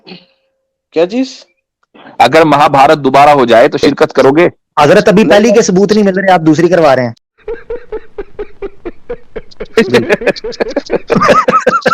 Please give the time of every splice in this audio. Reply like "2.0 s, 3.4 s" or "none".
none